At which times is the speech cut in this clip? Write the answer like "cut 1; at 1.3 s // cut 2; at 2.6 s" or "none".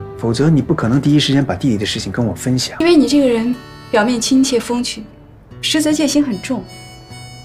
cut 1; at 2.8 s

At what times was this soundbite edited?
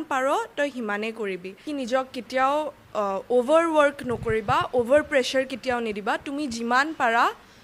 cut 1; at 1.6 s

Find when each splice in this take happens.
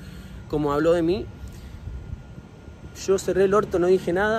none

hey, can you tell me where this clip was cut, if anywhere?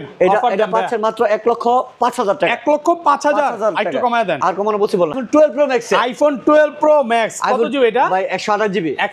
cut 1; at 5.2 s

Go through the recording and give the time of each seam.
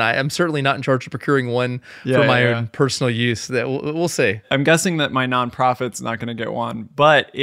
none

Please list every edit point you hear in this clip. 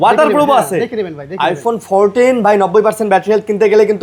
none

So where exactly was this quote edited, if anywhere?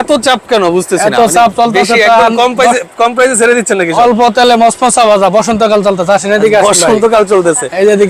none

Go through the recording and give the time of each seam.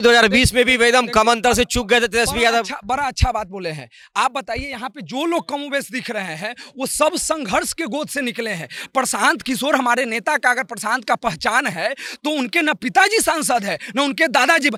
none

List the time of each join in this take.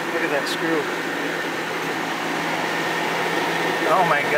none

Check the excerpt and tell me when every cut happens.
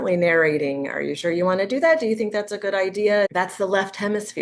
cut 1; at 3.3 s

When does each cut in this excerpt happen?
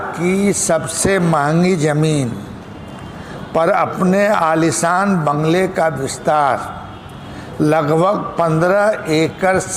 none

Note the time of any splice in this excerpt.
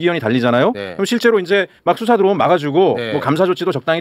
none

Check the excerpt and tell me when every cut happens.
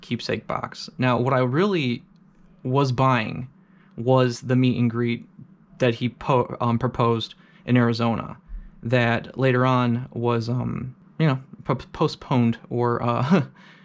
cut 1; at 11.0 s

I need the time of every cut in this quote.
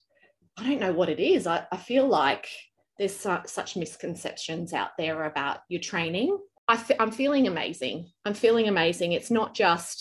cut 1; at 6.5 s

